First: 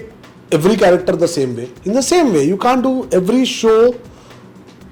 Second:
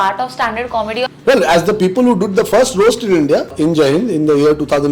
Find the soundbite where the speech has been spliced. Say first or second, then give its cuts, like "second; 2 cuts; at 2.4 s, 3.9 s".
second; 2 cuts; at 1.2 s, 3.5 s